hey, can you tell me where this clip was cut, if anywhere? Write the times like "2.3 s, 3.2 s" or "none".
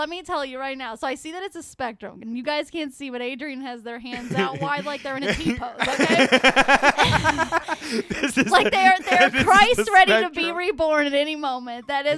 none

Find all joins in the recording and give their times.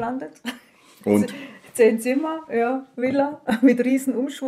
none

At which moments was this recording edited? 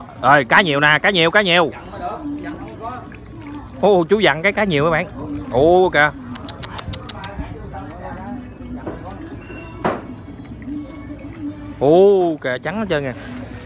none

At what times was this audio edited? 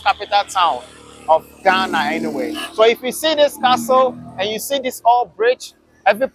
none

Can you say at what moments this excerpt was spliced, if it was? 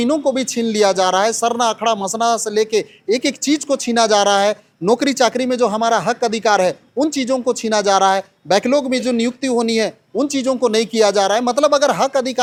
none

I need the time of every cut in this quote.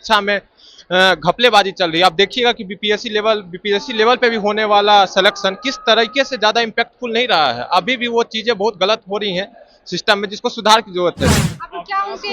11.3 s

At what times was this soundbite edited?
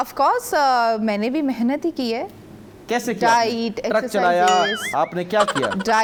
none

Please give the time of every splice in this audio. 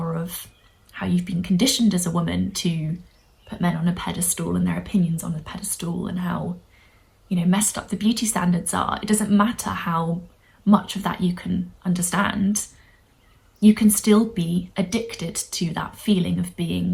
none

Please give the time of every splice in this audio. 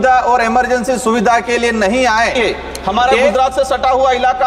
2.3 s

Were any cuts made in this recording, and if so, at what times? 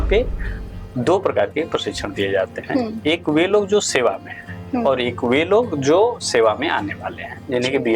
none

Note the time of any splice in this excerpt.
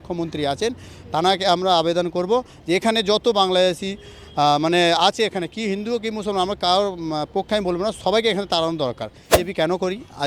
9.3 s

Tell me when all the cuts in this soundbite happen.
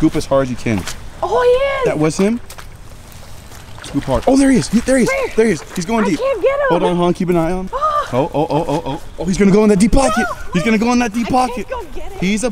7.7 s, 9.0 s

